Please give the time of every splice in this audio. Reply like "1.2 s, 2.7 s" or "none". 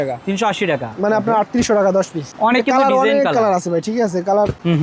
none